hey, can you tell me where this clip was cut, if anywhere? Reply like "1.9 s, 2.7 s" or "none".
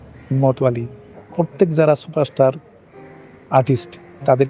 1.2 s